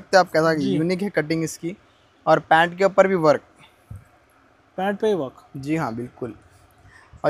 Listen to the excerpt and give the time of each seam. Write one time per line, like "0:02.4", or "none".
none